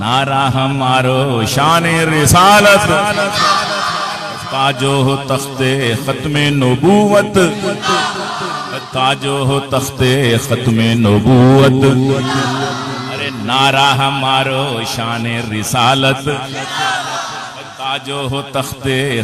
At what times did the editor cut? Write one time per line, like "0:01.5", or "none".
none